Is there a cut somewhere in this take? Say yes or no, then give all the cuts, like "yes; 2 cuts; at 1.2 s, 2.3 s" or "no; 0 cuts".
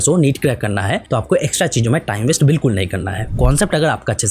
yes; 2 cuts; at 1.0 s, 3.2 s